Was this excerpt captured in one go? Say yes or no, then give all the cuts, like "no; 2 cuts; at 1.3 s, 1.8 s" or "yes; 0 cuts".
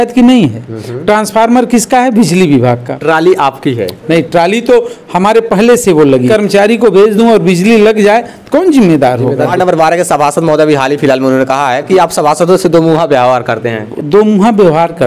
no; 5 cuts; at 2.9 s, 6.3 s, 9.5 s, 11.9 s, 13.8 s